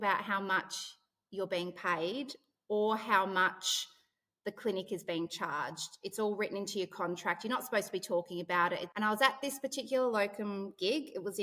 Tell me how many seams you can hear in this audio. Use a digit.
1